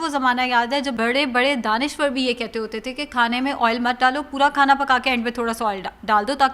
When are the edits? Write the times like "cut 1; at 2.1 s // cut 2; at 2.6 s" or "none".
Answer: cut 1; at 0.9 s